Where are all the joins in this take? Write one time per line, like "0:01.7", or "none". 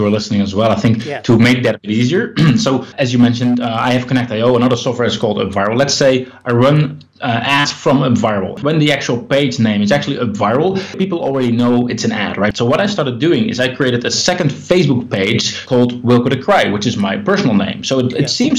0:08.6
0:11.0
0:12.5
0:15.6